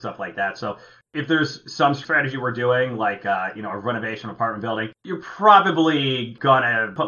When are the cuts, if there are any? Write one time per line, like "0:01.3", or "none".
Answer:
0:01.0